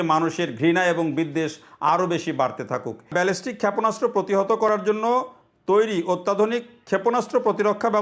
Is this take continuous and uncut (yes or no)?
no